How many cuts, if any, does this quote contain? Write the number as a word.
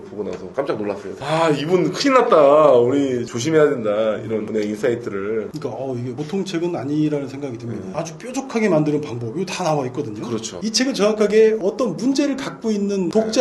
four